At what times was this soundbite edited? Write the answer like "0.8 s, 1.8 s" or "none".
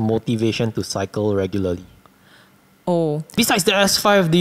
3.4 s